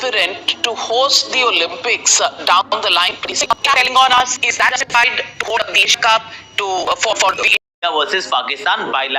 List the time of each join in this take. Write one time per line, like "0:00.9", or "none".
0:07.6